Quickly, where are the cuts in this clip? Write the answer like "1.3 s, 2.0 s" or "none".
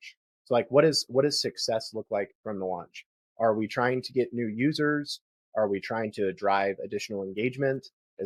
none

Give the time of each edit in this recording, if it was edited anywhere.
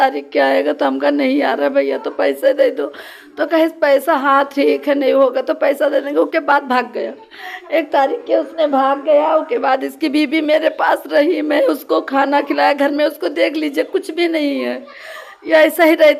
none

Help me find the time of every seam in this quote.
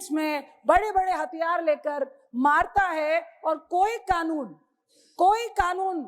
none

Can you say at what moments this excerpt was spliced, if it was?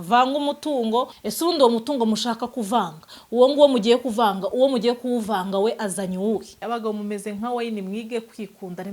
1.2 s, 6.5 s

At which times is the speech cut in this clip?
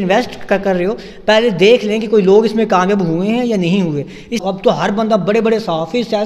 4.4 s

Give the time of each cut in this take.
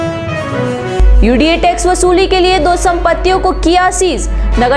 0.9 s

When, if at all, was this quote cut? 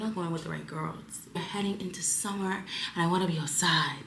1.4 s

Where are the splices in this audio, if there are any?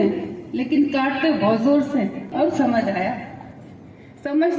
2.3 s

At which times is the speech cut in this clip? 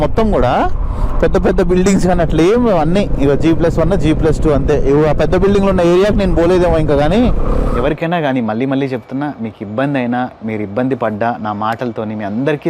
7.7 s

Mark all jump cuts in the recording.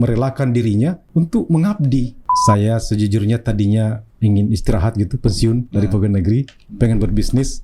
1.0 s, 2.2 s

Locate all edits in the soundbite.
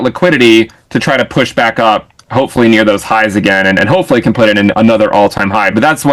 none

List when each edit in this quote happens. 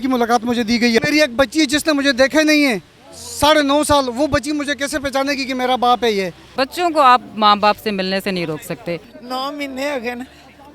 1.0 s, 6.4 s, 9.1 s

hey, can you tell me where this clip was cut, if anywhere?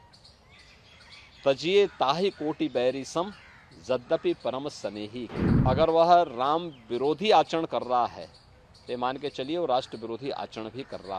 5.3 s

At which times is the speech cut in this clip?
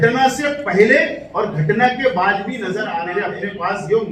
2.9 s

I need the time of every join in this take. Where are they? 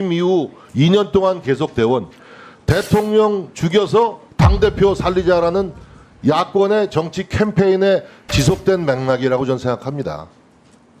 none

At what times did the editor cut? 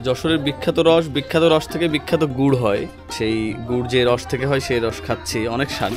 3.0 s

